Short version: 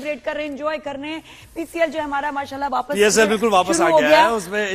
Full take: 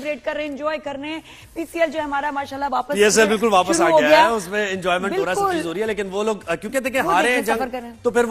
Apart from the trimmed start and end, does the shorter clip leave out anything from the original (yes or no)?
no